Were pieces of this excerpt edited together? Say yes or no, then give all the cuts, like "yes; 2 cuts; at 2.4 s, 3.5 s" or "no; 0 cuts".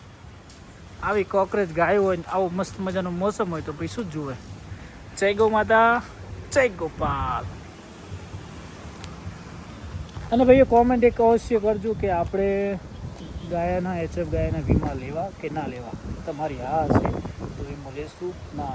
no; 0 cuts